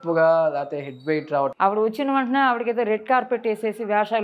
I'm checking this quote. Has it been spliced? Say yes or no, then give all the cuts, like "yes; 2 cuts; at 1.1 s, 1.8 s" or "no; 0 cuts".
yes; 1 cut; at 1.5 s